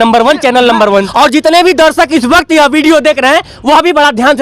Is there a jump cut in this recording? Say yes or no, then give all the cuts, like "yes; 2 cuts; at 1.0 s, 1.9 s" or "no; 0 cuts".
yes; 1 cut; at 1.1 s